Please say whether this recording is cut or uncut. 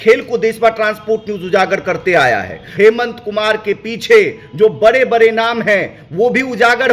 cut